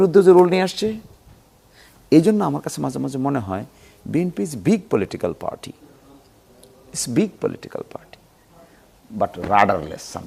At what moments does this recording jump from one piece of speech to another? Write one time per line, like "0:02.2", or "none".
none